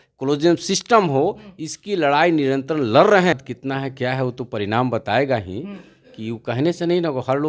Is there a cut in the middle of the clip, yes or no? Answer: yes